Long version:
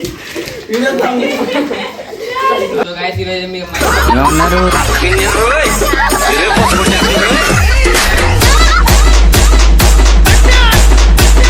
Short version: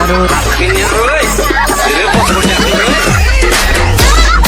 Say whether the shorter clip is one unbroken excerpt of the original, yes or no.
yes